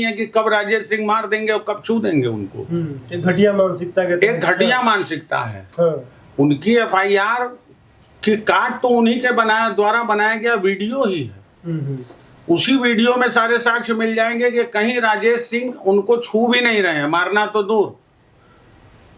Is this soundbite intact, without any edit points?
yes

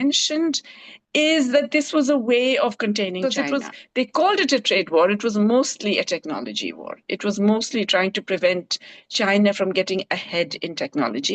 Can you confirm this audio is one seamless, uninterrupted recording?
no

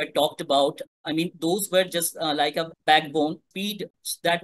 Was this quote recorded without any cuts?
no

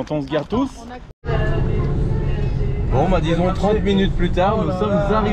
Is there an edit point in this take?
yes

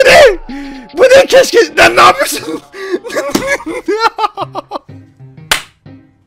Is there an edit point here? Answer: no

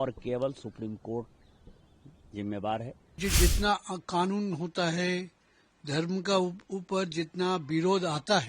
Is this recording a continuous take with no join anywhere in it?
no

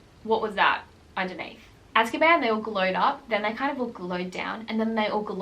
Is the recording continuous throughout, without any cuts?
no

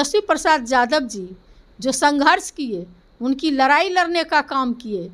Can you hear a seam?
no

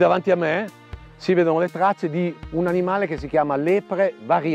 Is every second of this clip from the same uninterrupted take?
yes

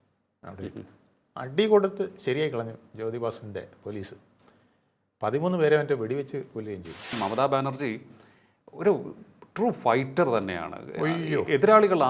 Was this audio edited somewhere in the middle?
yes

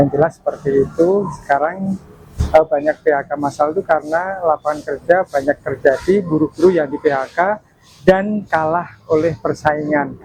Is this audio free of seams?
yes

